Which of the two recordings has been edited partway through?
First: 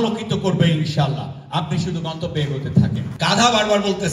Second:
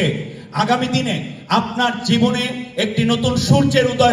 first; 1 cut; at 3.1 s

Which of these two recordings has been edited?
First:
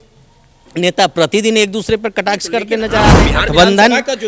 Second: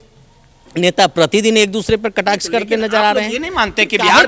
first; 1 cut; at 3.2 s

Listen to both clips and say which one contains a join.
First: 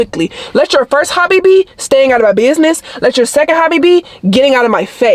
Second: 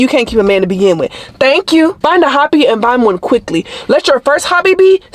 second; 1 cut; at 2.0 s

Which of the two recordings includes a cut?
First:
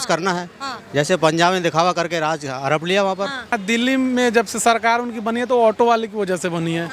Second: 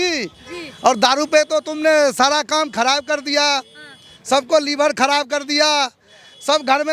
first; 1 cut; at 3.6 s

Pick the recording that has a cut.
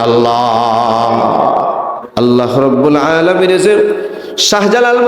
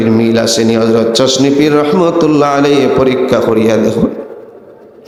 first; 1 cut; at 2.0 s

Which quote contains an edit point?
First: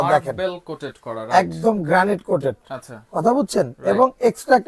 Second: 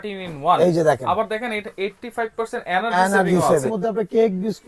second; 1 cut; at 3.7 s

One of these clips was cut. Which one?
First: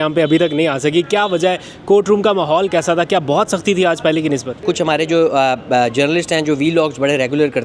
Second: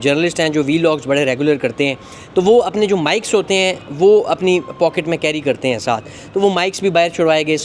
first; 1 cut; at 4.6 s

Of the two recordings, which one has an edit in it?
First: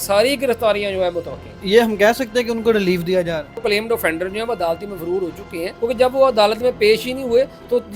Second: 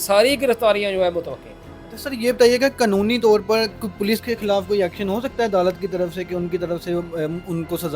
first; 3 cuts; at 1.6 s, 3.6 s, 5.7 s

